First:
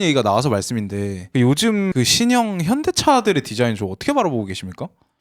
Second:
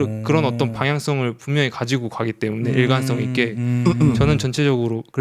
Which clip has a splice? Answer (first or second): first